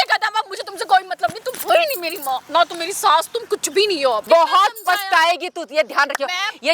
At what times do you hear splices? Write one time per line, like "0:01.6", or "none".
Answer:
0:04.2